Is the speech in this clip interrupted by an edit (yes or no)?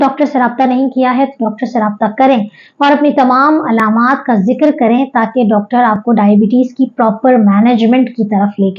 no